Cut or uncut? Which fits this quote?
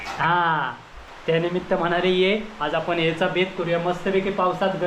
cut